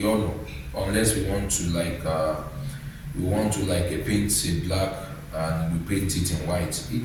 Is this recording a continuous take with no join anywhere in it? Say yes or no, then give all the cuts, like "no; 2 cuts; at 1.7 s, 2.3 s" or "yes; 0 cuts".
yes; 0 cuts